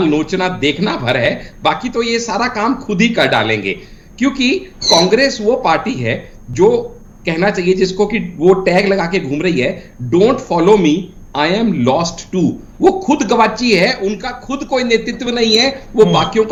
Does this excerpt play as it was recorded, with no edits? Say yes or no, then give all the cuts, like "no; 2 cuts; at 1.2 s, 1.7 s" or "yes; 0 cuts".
yes; 0 cuts